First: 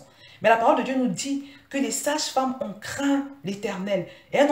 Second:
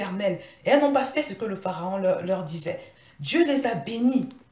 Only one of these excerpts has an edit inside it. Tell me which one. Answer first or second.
second